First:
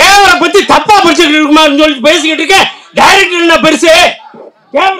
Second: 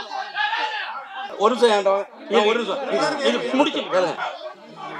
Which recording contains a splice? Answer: second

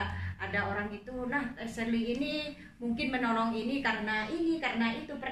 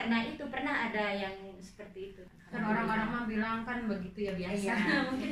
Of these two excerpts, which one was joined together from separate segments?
second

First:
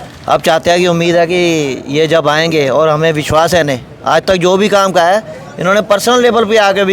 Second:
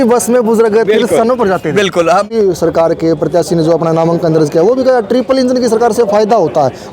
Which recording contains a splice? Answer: second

